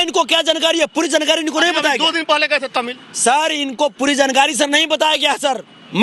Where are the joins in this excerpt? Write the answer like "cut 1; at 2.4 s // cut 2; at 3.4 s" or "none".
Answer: none

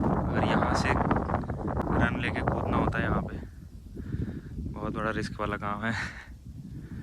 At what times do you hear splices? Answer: cut 1; at 1.8 s

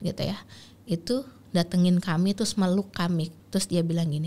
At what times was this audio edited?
cut 1; at 3.4 s

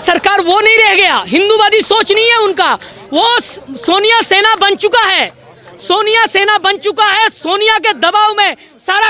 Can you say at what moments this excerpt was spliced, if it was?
none

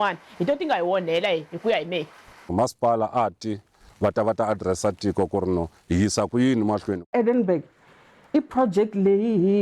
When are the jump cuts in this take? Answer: cut 1; at 2.5 s // cut 2; at 3.8 s // cut 3; at 7.1 s

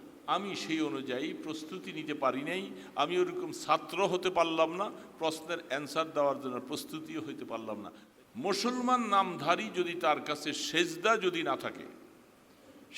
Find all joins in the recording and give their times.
cut 1; at 8.0 s

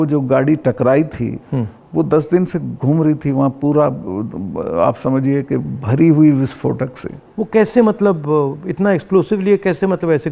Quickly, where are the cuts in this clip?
none

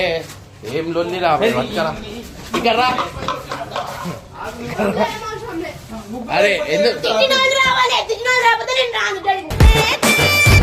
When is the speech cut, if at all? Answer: none

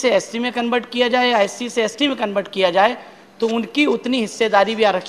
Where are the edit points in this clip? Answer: none

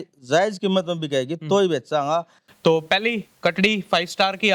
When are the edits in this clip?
cut 1; at 2.4 s

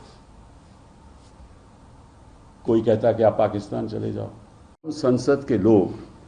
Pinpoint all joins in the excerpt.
cut 1; at 5.0 s

